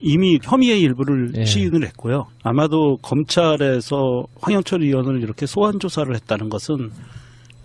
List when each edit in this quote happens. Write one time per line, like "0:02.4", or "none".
none